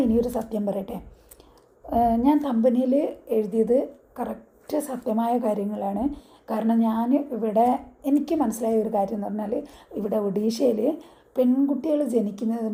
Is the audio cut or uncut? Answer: uncut